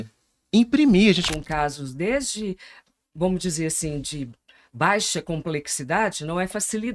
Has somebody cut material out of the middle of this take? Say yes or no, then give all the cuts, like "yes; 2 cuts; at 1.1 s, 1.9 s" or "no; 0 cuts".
yes; 1 cut; at 1.2 s